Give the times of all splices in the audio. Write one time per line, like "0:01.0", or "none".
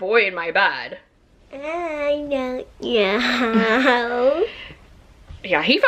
none